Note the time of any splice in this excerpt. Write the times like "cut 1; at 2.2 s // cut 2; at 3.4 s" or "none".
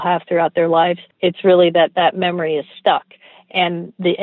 cut 1; at 1.1 s